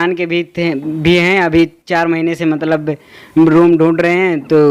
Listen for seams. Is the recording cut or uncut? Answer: uncut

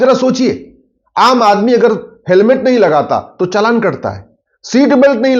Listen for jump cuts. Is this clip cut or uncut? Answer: uncut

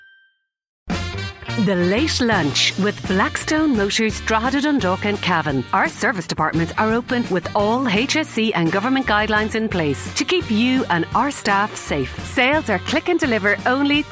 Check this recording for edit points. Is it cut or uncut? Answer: cut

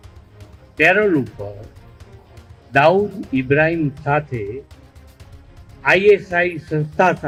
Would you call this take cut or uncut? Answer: uncut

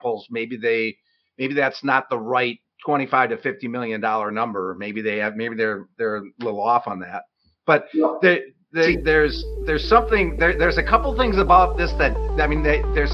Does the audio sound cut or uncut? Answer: uncut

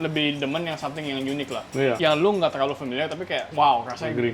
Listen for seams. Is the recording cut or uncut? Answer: cut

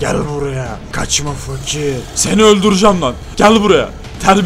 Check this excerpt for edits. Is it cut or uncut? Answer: cut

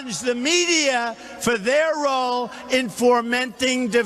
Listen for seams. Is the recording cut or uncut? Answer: cut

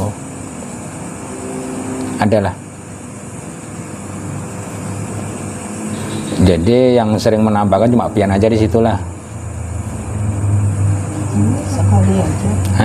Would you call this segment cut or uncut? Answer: uncut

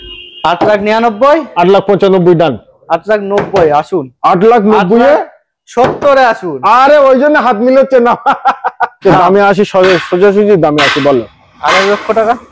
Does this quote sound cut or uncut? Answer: cut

